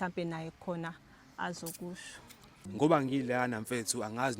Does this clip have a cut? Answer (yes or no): yes